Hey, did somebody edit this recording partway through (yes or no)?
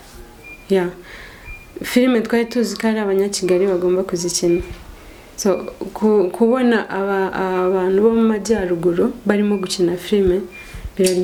no